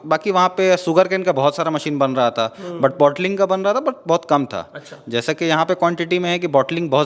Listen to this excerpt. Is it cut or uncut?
uncut